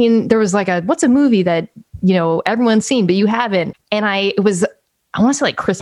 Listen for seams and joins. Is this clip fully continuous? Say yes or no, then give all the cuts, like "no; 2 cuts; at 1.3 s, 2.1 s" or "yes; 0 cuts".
no; 1 cut; at 3.8 s